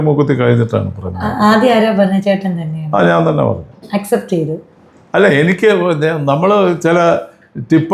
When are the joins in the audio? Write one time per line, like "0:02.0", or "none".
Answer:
none